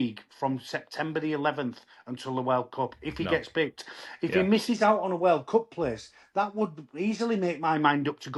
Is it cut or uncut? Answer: uncut